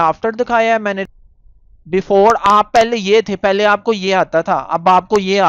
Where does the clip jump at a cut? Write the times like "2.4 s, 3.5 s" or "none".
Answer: 1.1 s